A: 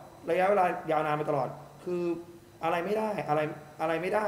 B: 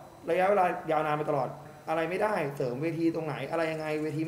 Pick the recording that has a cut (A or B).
B